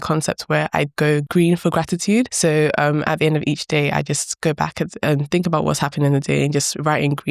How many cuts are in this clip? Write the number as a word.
two